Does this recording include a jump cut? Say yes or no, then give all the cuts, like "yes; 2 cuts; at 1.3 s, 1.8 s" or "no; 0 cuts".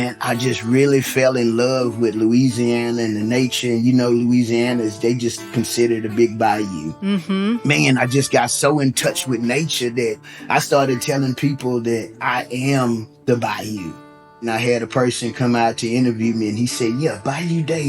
yes; 1 cut; at 14.4 s